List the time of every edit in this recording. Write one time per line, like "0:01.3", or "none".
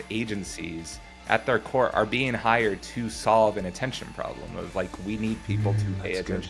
none